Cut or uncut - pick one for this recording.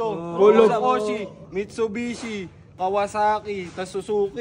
cut